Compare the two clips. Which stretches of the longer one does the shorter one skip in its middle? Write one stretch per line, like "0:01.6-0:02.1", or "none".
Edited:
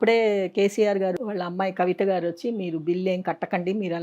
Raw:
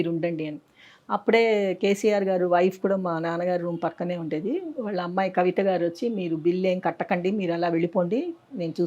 0:02.4-0:04.7